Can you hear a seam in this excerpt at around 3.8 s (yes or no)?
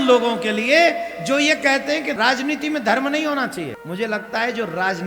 yes